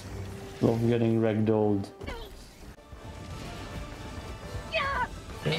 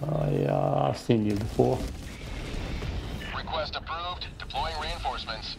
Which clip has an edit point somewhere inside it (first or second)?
first